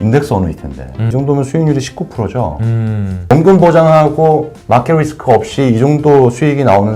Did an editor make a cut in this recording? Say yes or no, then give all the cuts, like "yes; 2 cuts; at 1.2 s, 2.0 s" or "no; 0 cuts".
yes; 1 cut; at 1.0 s